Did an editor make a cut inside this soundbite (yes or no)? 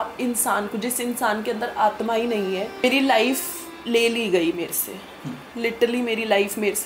yes